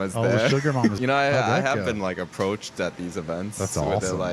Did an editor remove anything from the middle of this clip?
yes; 1 cut; at 1.0 s

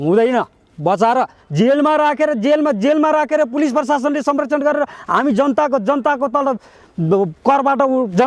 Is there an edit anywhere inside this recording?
no; 0 cuts

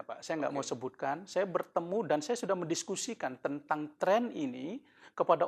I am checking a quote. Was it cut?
no; 0 cuts

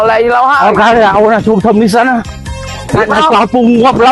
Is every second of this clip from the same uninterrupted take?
yes; 0 cuts

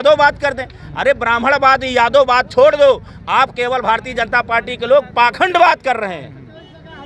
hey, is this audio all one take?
yes; 0 cuts

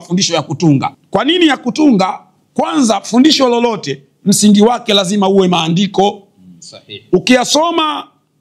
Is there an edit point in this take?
yes; 1 cut; at 1.0 s

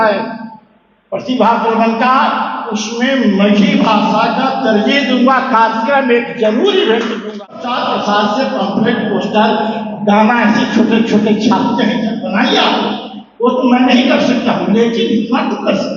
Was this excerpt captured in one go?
no; 1 cut; at 7.4 s

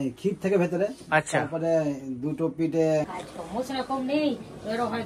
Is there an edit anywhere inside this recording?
yes; 1 cut; at 3.0 s

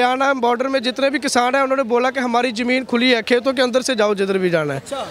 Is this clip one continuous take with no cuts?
yes; 0 cuts

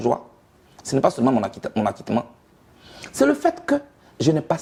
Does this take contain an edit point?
no; 0 cuts

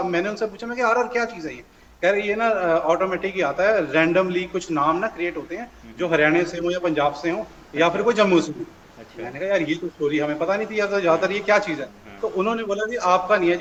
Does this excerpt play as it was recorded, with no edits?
yes; 0 cuts

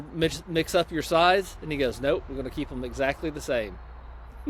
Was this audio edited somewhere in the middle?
no; 0 cuts

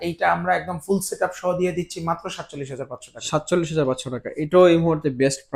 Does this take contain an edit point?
no; 0 cuts

